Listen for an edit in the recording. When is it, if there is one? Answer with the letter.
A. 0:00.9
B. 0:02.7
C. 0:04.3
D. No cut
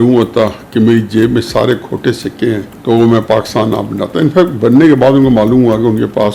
B